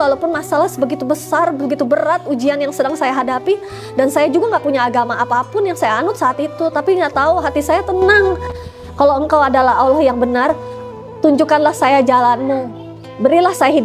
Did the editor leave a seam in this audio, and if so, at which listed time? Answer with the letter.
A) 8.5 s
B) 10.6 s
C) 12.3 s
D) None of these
A